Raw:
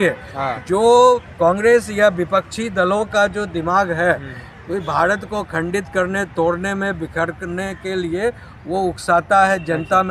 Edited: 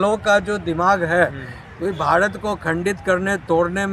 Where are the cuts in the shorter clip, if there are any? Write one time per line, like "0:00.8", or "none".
none